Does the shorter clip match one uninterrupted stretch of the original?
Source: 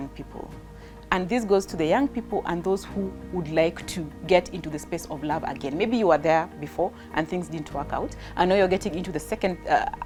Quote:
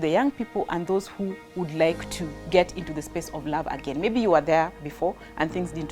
yes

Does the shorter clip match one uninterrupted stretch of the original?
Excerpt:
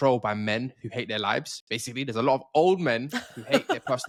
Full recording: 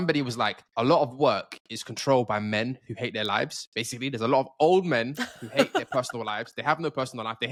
yes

